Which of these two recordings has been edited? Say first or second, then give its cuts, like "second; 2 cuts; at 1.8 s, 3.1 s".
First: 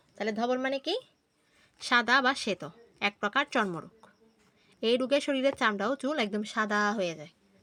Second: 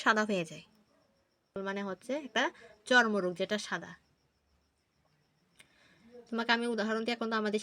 second; 1 cut; at 1.6 s